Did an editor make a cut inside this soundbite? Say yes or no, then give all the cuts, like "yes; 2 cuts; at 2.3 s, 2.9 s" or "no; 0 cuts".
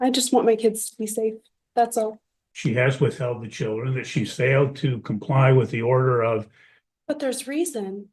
yes; 1 cut; at 2.2 s